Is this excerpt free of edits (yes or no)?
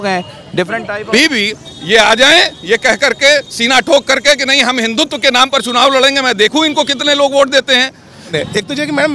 no